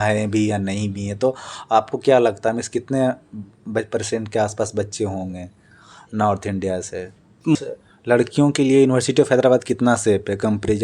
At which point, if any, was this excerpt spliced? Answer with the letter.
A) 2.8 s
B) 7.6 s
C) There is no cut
B